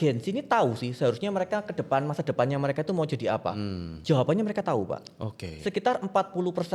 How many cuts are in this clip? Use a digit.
0